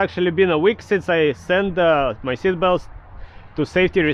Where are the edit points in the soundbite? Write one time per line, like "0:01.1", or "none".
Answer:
none